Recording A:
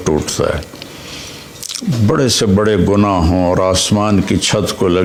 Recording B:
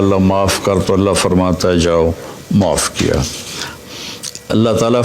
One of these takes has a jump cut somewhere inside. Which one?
B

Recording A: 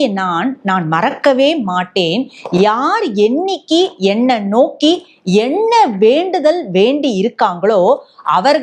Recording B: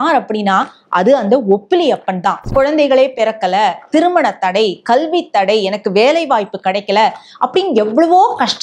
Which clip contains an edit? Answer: B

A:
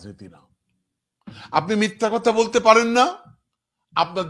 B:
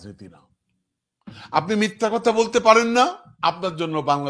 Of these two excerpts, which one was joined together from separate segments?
B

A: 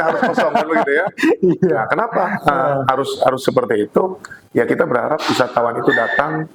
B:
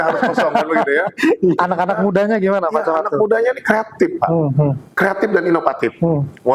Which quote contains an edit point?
B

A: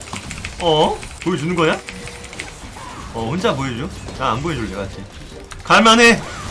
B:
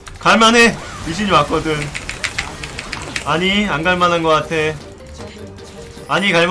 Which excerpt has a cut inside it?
A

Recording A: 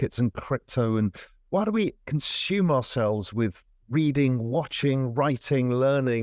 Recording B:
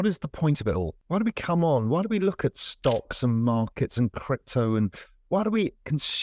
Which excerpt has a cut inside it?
B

